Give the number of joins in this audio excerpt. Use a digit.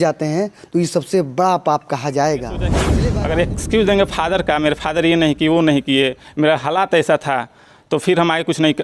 1